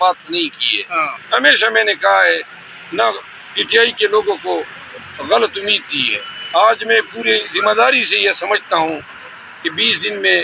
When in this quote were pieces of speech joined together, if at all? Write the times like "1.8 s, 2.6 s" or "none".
none